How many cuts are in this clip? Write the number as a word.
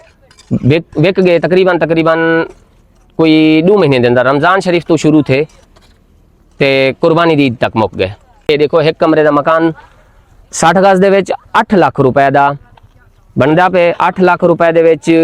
one